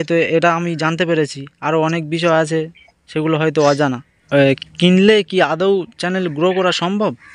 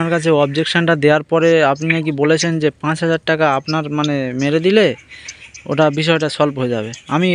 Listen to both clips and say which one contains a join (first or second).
first